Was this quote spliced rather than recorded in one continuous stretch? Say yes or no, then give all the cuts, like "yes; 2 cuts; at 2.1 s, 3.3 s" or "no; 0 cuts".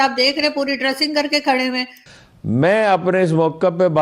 yes; 1 cut; at 2.0 s